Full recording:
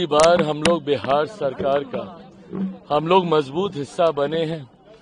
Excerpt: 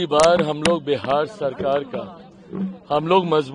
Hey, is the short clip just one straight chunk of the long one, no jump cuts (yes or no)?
yes